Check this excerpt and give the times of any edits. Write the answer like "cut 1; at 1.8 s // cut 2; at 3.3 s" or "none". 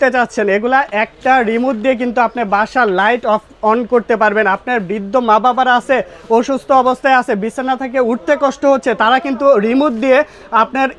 none